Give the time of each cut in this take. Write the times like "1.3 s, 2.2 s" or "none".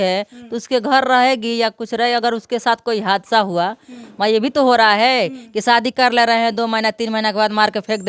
none